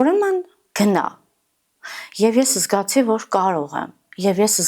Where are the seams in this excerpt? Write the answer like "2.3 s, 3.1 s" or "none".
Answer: none